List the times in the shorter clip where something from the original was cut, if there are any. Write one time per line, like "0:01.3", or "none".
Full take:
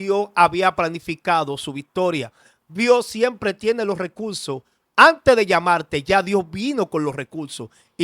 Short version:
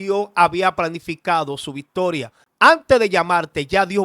0:02.4